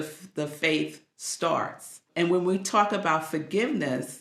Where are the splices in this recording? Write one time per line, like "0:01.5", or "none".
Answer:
0:02.1